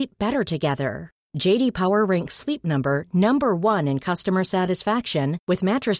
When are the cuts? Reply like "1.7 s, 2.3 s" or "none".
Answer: none